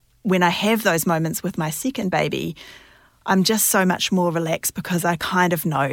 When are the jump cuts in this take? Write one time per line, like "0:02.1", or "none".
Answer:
none

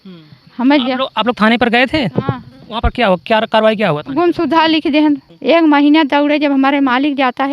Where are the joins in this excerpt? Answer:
0:05.3

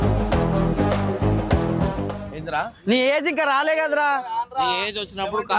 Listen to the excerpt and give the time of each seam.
0:02.2

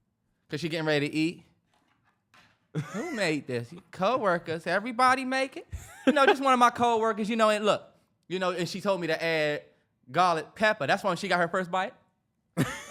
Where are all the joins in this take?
none

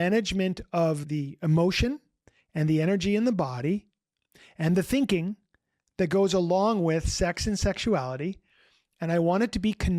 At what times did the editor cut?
0:01.0

